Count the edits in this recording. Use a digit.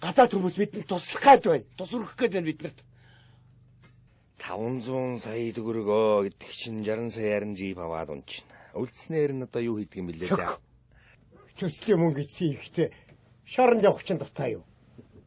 0